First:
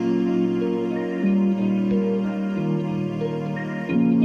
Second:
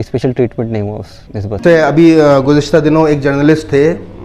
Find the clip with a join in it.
second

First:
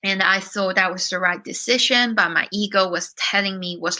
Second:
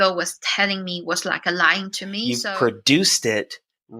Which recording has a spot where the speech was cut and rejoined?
second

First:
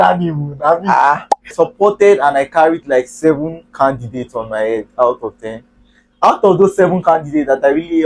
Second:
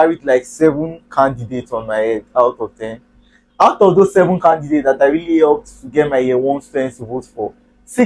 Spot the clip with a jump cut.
first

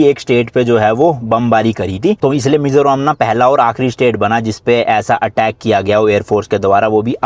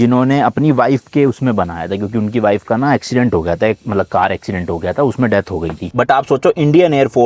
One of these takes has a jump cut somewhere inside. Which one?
second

